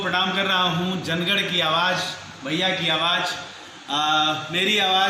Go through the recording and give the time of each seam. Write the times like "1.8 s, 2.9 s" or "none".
none